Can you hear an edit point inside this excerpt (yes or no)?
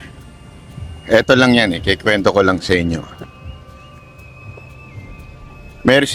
no